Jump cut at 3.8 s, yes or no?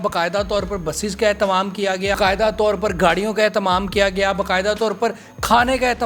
no